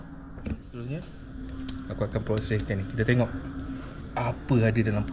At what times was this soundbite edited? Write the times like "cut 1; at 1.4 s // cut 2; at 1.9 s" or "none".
cut 1; at 1.1 s